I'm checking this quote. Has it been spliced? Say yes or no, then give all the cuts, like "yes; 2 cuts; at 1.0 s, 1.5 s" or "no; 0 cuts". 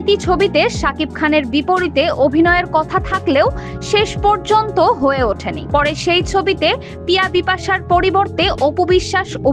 no; 0 cuts